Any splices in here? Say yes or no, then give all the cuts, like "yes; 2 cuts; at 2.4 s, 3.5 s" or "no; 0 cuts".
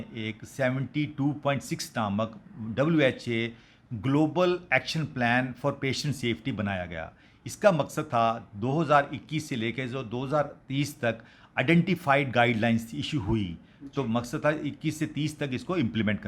no; 0 cuts